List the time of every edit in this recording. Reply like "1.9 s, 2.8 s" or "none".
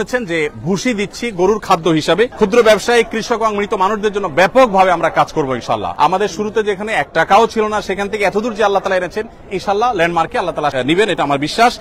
2.3 s, 5.9 s, 10.7 s